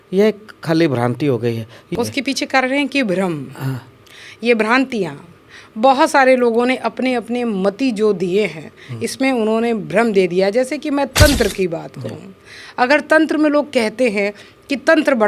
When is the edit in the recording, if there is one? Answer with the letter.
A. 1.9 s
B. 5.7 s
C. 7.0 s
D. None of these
A